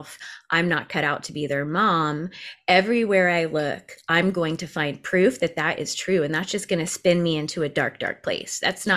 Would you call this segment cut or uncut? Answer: uncut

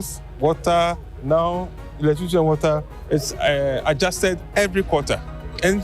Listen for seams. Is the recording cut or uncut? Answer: cut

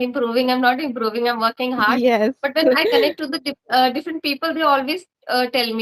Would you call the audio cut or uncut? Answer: uncut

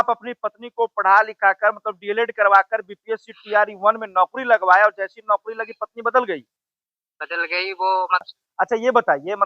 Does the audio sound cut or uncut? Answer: cut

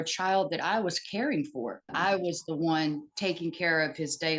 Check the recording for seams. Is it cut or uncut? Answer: cut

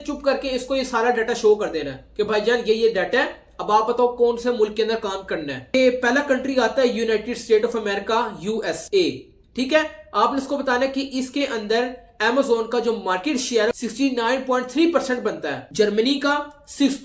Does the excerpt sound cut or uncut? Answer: uncut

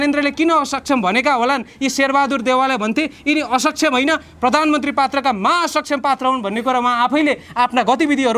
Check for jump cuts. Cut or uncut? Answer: uncut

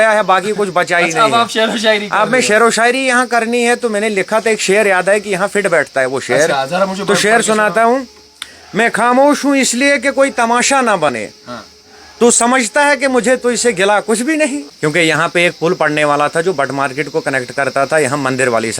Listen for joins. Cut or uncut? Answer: cut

